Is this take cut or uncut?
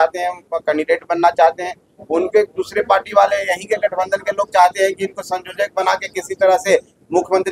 uncut